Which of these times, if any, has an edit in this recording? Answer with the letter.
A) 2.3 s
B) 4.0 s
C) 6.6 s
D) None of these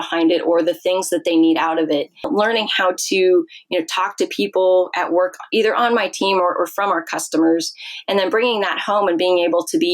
A